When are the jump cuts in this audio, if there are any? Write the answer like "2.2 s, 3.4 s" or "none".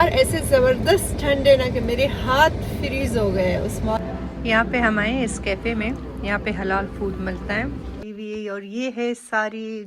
4.0 s, 8.0 s